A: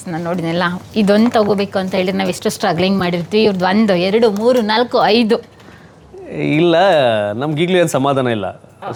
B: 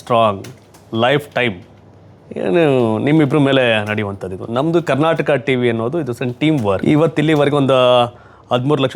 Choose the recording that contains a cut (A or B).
B